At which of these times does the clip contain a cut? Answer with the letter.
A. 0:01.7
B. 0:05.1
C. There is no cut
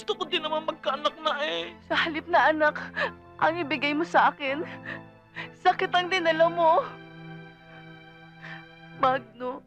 A